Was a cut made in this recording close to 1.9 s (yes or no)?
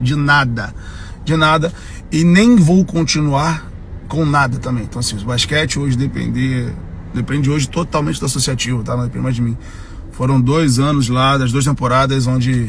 no